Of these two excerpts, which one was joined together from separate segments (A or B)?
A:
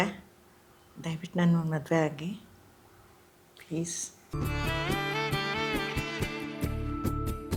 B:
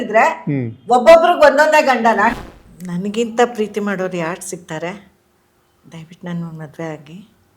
B